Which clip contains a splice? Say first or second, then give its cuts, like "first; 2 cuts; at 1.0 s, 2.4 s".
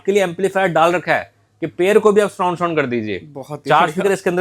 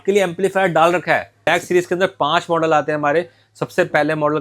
second; 1 cut; at 1.5 s